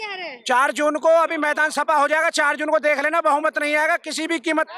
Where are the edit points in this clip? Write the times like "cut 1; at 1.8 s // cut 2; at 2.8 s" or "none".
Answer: none

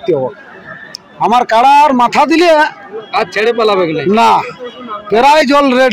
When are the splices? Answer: none

